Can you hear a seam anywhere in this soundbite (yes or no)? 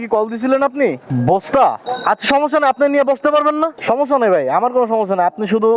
yes